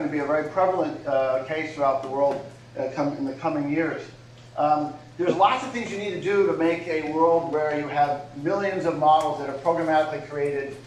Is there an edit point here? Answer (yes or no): no